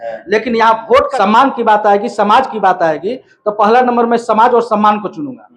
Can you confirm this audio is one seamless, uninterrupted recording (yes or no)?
no